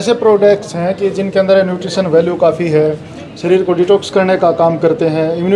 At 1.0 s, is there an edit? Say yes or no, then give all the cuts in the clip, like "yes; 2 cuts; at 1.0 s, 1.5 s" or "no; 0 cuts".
no; 0 cuts